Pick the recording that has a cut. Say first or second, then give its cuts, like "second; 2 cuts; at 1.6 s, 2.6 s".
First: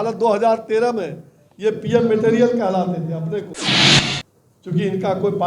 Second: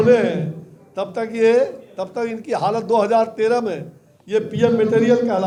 first; 1 cut; at 3.9 s